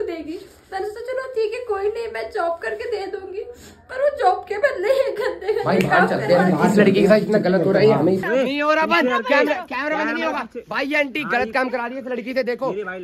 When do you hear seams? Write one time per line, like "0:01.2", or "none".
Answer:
0:08.2